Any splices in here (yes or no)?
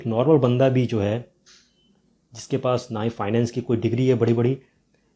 no